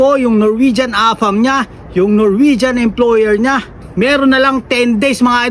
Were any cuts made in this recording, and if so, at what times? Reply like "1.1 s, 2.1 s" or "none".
3.8 s